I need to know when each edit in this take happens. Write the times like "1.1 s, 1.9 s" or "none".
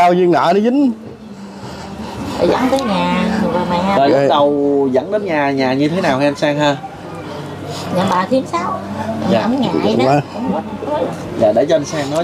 none